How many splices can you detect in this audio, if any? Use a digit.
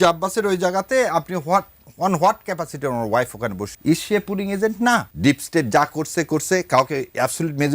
2